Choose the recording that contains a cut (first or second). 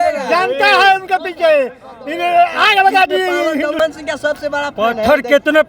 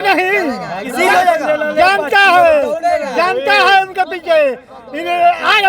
first